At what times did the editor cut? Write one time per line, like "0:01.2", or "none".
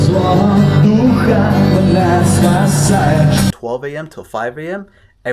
0:03.5